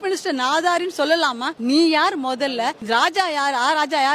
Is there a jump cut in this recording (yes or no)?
yes